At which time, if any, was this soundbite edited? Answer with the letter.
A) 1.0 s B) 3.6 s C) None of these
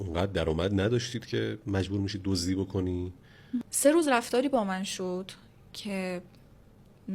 B